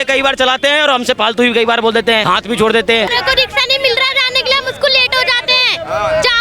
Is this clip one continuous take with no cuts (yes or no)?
no